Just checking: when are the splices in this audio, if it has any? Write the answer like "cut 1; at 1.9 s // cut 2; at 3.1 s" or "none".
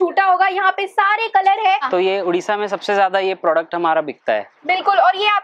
cut 1; at 1.8 s